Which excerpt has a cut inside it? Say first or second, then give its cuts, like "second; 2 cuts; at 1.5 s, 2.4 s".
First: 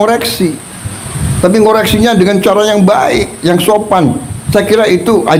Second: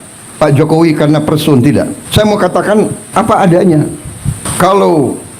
second; 3 cuts; at 2.0 s, 3.0 s, 4.5 s